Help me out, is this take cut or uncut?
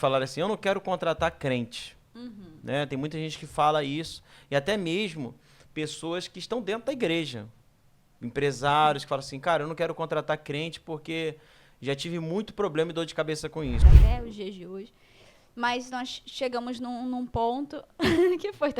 cut